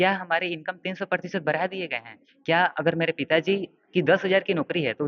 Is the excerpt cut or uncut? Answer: uncut